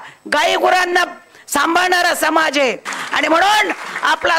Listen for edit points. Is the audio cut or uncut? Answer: cut